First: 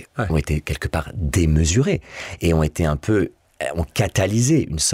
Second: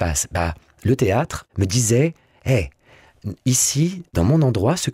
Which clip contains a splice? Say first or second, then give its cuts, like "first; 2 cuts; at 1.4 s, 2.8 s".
second; 2 cuts; at 1.4 s, 4.1 s